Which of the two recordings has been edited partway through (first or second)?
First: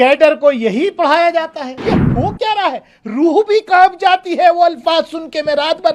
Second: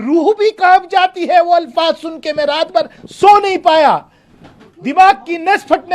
first